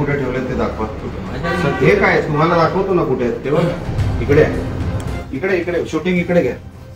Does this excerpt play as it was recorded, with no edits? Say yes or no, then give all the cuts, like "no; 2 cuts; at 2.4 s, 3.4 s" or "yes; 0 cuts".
no; 1 cut; at 5.2 s